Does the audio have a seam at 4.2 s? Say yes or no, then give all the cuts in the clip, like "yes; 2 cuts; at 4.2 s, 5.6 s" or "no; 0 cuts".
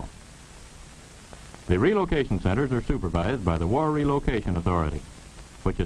no; 1 cut; at 2.6 s